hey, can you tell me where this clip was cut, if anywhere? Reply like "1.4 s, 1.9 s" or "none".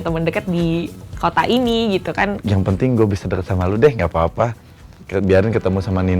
2.4 s